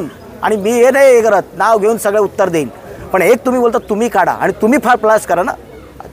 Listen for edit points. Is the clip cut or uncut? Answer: uncut